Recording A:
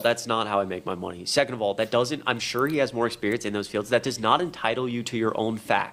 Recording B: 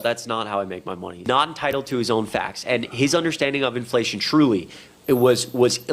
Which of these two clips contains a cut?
B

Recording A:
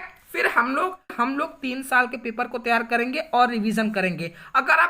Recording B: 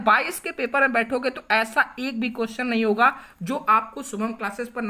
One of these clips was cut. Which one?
A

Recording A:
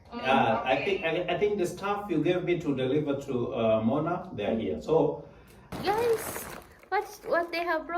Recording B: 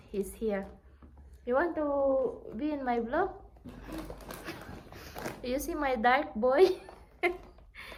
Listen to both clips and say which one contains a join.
A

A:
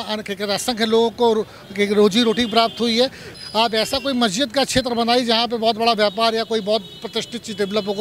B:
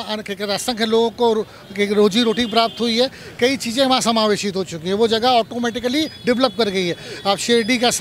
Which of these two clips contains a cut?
A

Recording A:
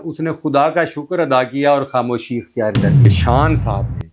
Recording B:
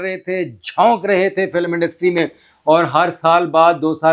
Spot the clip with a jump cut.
A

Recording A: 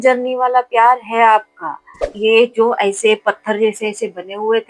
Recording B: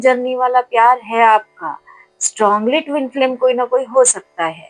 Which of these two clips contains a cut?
A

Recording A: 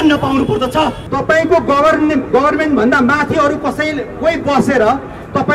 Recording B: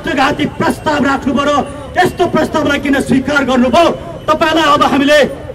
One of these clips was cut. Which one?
A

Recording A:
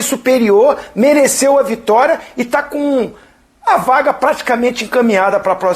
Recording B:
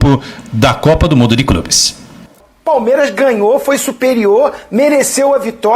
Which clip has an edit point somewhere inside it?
B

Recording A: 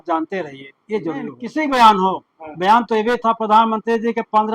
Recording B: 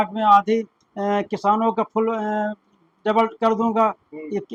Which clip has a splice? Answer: A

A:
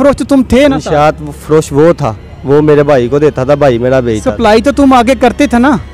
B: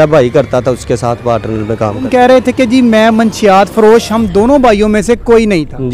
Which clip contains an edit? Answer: B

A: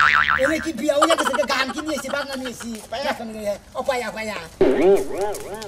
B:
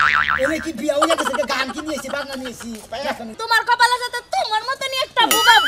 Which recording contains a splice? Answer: B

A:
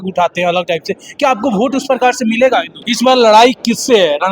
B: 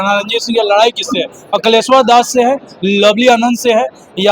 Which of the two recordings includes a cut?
A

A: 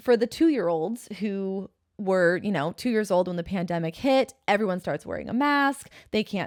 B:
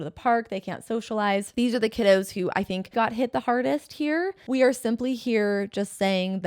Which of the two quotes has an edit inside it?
B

